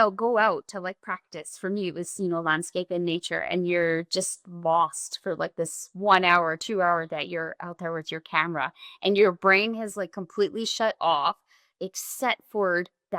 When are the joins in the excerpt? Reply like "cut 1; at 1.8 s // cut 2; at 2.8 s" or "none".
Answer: none